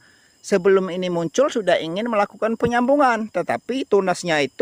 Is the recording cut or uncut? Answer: uncut